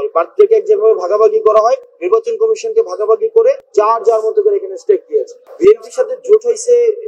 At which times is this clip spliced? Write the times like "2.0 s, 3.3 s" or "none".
1.9 s, 3.6 s, 5.4 s